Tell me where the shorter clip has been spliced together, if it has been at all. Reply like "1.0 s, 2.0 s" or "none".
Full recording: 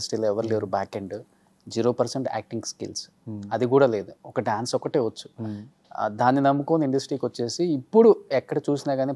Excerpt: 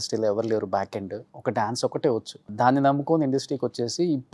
1.3 s, 2.5 s